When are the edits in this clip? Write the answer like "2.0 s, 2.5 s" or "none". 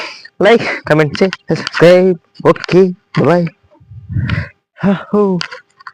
none